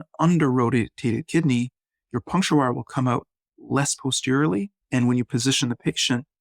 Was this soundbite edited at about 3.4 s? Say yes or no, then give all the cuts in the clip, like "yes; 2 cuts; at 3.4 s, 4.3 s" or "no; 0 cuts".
no; 1 cut; at 4.8 s